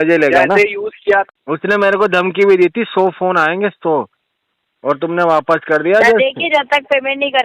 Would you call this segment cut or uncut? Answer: cut